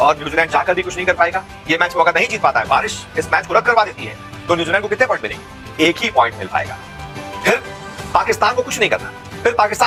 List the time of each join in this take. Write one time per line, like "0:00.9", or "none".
none